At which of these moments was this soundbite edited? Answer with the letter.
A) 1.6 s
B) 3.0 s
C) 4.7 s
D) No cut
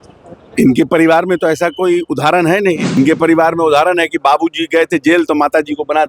B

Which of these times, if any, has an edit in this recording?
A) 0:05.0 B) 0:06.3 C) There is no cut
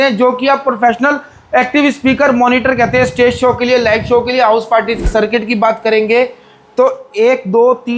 A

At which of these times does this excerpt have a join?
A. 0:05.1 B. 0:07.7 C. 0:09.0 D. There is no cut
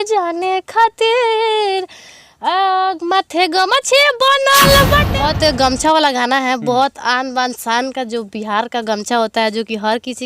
A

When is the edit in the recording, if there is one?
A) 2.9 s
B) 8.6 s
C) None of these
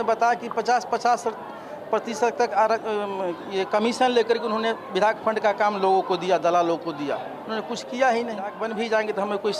B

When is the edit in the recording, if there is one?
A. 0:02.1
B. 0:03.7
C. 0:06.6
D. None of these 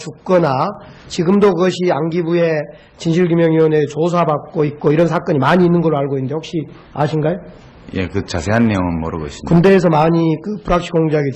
C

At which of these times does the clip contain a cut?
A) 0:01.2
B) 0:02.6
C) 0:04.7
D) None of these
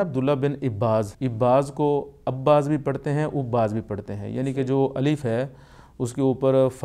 A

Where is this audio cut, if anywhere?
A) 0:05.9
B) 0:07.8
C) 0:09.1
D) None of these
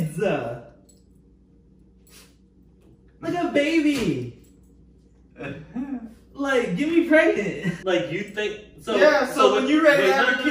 B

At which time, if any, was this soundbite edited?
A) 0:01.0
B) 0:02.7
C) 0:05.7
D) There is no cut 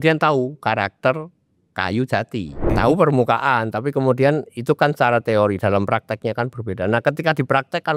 B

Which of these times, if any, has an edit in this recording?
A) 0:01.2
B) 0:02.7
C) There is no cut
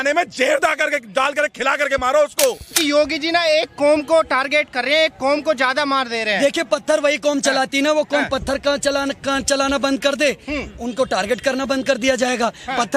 B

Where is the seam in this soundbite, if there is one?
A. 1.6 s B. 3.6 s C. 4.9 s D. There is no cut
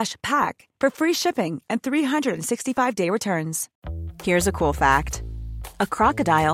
B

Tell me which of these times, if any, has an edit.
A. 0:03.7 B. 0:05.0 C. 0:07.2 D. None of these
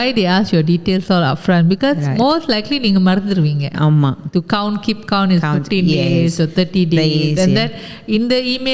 D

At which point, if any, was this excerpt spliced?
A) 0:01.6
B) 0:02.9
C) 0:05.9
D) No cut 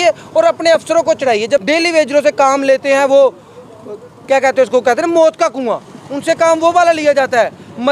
A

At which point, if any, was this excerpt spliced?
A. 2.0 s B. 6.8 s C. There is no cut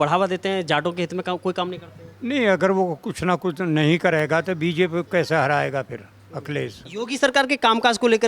B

